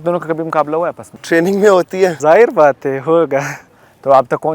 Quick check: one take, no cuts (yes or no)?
no